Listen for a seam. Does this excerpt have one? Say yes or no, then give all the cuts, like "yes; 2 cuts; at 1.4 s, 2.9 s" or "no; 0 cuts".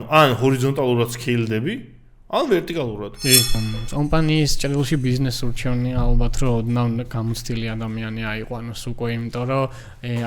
yes; 1 cut; at 3.6 s